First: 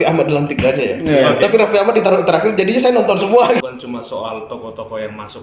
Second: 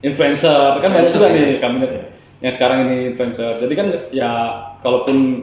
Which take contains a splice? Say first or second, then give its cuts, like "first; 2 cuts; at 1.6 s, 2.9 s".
first; 1 cut; at 3.6 s